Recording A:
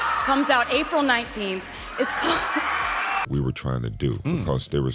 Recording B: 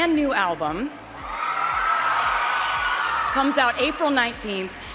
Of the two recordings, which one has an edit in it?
A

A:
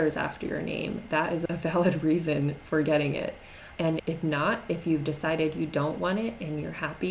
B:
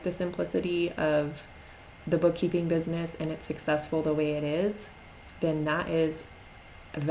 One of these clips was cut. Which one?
A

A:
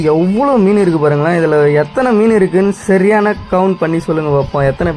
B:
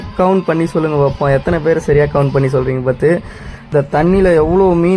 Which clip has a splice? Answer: B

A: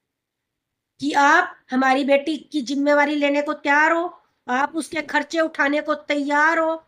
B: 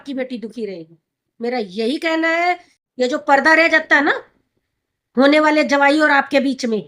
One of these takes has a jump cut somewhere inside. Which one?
B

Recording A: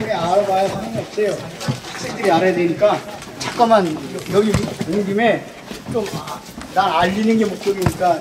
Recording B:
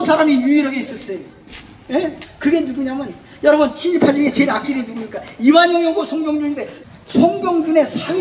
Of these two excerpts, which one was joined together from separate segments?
B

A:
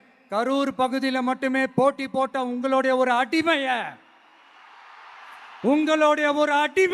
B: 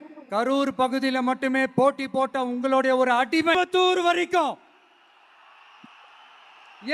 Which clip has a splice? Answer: B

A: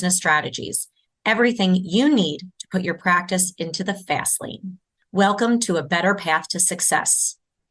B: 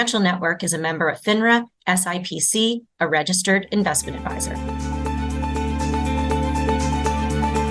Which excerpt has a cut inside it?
B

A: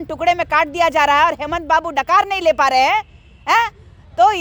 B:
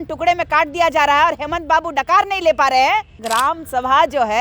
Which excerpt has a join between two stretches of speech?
B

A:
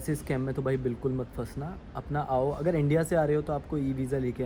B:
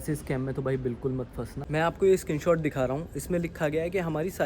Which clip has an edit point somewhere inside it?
B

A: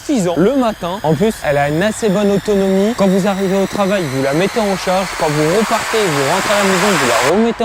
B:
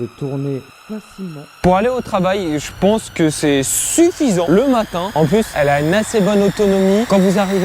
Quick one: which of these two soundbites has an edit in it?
B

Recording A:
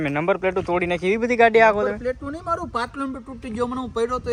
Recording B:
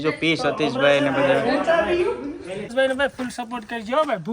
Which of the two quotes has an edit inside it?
B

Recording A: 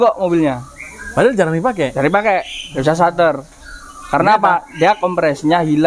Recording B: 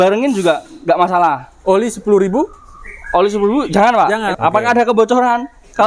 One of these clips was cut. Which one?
B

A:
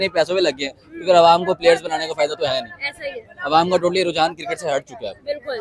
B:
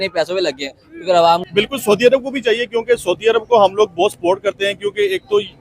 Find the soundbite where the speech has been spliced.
B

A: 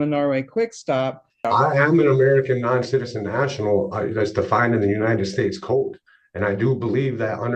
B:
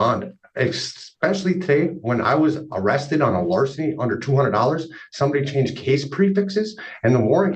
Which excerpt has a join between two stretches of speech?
A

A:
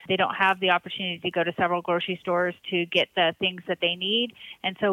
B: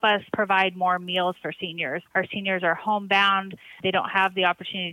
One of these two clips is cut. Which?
B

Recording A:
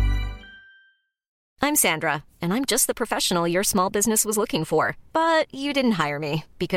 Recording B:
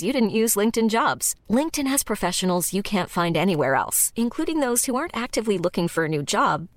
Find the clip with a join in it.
A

